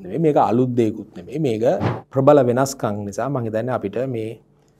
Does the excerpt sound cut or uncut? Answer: cut